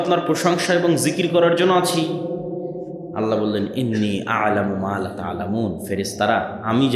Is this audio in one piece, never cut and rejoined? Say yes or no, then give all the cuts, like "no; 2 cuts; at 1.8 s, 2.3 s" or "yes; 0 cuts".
yes; 0 cuts